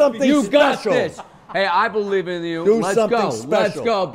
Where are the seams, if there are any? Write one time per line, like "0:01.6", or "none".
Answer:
none